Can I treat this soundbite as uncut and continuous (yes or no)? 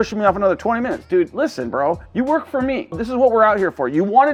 yes